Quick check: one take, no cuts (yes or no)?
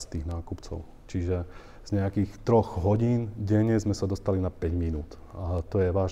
yes